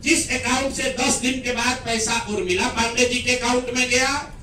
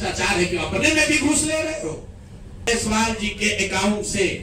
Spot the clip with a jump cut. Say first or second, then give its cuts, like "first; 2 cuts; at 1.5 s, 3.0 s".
second; 1 cut; at 2.7 s